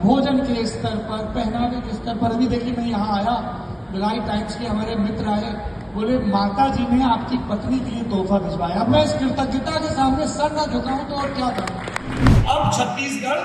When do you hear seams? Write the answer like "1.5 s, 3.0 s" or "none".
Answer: 12.4 s